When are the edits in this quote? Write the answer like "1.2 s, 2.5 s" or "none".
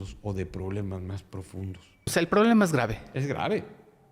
2.1 s